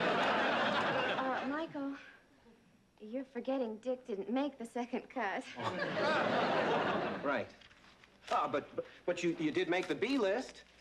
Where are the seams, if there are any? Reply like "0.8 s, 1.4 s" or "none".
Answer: 9.4 s